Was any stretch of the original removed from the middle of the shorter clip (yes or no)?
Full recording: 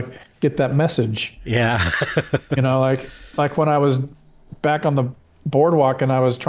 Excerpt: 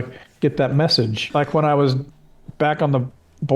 yes